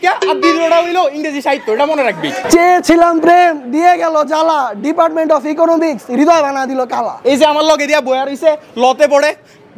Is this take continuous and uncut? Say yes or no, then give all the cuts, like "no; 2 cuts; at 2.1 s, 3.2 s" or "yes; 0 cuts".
no; 2 cuts; at 2.4 s, 7.1 s